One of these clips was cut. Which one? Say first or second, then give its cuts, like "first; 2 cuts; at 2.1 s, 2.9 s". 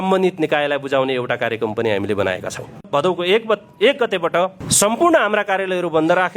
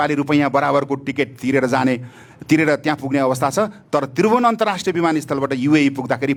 first; 2 cuts; at 2.9 s, 4.6 s